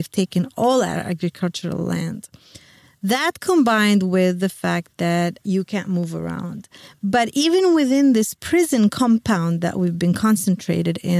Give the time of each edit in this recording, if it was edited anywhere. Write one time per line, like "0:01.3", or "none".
0:05.4